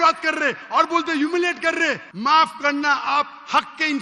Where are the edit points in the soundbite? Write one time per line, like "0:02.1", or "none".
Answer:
0:02.1